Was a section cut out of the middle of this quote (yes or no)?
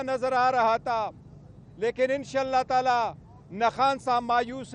no